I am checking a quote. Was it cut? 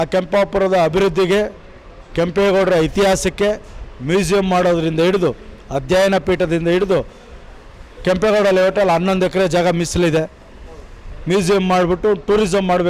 no; 0 cuts

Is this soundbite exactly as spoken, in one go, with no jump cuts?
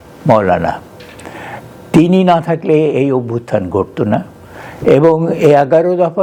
yes; 0 cuts

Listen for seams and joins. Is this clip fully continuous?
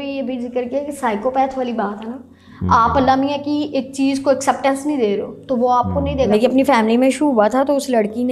no; 1 cut; at 6.3 s

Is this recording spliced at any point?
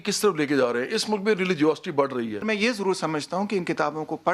yes; 1 cut; at 2.3 s

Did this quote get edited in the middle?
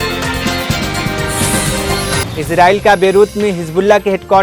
yes; 1 cut; at 2.3 s

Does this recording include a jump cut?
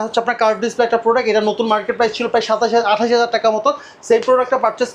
no; 0 cuts

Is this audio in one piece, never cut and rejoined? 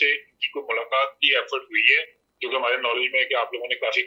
yes; 0 cuts

